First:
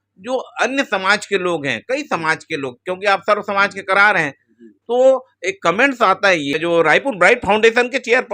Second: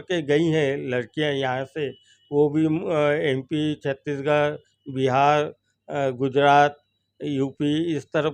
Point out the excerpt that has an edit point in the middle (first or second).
first